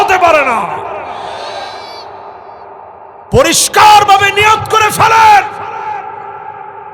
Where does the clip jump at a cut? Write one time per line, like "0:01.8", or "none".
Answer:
0:03.2